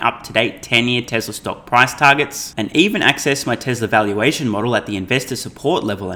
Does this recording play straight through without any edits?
yes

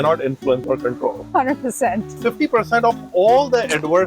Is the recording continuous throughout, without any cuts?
no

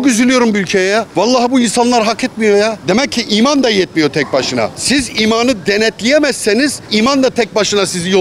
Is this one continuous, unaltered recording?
no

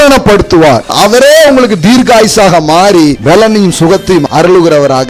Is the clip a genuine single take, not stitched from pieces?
no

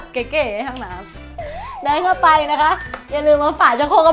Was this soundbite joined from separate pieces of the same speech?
no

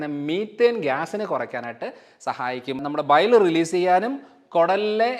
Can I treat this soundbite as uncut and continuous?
no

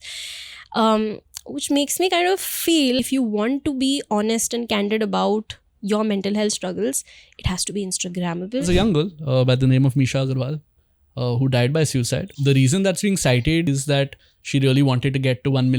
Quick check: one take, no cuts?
no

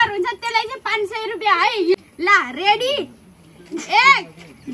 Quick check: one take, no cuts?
no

